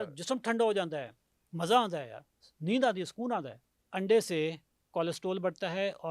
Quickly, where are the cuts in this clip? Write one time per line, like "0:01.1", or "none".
0:03.9